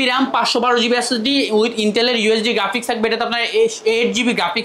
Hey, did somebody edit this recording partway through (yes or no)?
no